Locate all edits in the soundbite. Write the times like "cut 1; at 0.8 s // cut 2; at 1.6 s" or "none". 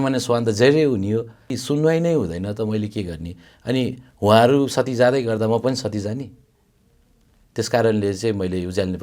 cut 1; at 1.6 s